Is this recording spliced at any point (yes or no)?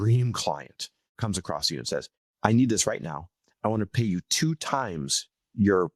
yes